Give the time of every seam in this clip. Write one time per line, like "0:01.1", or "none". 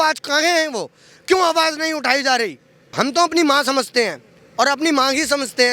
0:02.8